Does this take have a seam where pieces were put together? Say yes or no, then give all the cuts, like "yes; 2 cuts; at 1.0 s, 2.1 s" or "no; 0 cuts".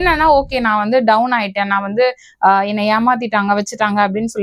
no; 0 cuts